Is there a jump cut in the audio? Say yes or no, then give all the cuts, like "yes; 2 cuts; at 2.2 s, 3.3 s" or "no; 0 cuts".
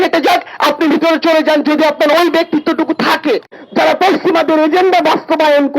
yes; 1 cut; at 3.6 s